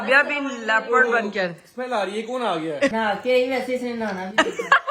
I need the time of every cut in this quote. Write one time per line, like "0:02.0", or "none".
0:02.9